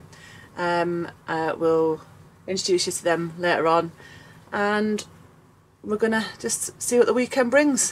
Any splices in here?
no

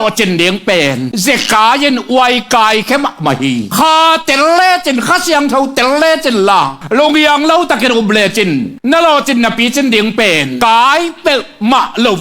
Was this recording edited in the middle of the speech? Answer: yes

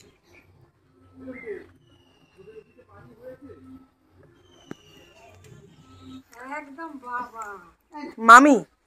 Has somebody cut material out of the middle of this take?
yes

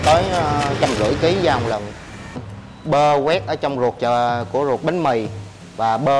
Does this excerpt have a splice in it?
yes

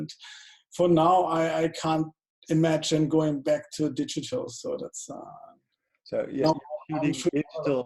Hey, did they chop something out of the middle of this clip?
no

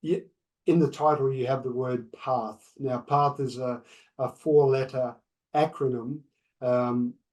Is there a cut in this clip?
no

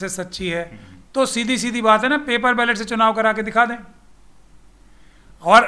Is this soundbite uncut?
yes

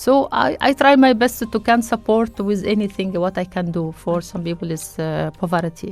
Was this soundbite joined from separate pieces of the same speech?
no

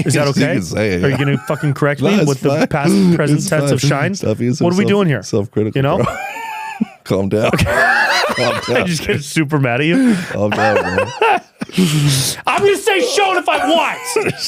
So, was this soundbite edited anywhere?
no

